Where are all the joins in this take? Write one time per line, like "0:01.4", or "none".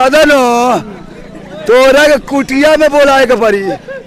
none